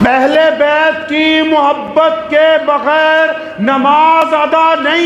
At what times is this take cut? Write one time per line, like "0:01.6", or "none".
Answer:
none